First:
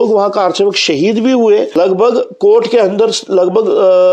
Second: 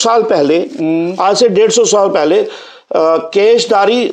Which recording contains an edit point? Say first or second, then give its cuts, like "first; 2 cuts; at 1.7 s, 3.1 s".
first; 1 cut; at 1.7 s